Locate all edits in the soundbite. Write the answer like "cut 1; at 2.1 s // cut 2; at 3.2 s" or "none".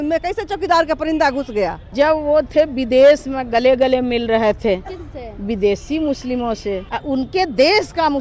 cut 1; at 1.9 s // cut 2; at 6.9 s